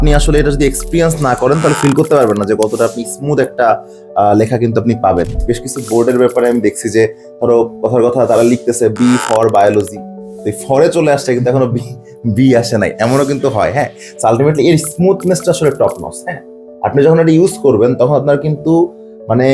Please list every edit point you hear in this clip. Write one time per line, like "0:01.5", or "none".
0:05.3